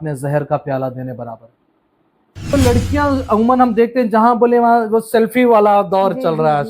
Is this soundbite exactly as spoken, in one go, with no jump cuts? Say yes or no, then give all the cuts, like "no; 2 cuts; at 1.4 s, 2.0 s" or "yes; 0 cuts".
no; 1 cut; at 2.5 s